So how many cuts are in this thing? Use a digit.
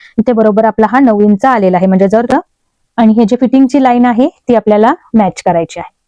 1